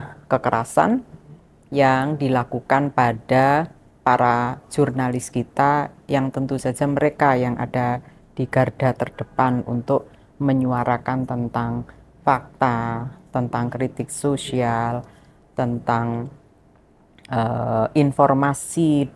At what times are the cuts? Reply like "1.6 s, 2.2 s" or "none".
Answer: none